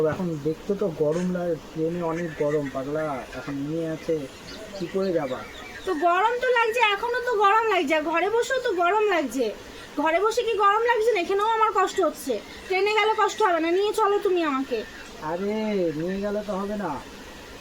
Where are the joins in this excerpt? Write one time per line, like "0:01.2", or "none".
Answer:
0:03.7